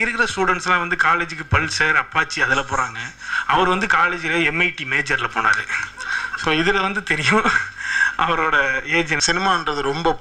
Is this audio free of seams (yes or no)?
no